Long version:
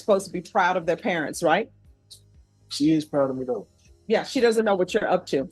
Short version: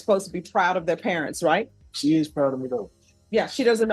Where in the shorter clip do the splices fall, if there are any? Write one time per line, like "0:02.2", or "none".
0:01.8